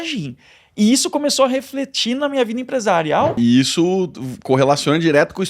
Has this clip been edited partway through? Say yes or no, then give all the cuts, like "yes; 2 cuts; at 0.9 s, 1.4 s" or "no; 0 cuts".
yes; 1 cut; at 3.4 s